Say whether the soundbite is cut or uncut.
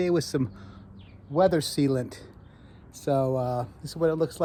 uncut